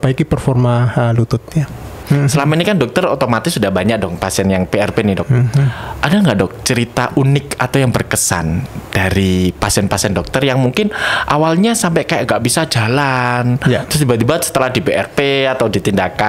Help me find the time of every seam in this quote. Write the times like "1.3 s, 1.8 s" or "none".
2.0 s